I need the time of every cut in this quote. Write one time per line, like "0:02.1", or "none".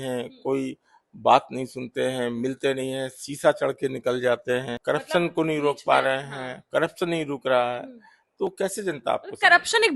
0:04.7